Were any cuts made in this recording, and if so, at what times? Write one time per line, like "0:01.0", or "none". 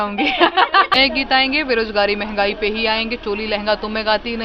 0:00.9